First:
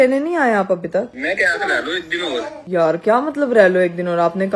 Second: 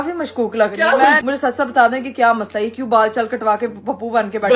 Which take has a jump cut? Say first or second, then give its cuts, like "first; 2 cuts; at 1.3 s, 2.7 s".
second; 1 cut; at 1.2 s